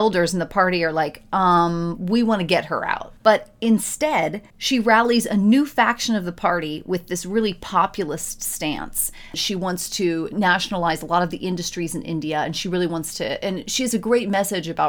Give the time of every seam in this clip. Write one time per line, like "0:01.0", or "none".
0:03.0
0:09.4